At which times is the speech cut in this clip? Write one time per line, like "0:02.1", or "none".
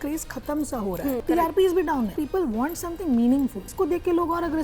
0:01.2
0:02.2
0:03.7